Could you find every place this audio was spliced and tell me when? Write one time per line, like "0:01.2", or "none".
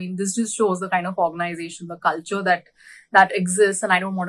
none